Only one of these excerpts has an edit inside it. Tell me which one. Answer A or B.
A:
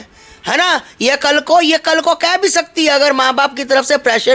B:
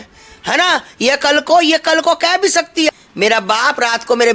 B